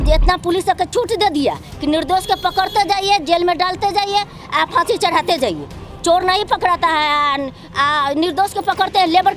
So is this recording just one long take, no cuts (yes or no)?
yes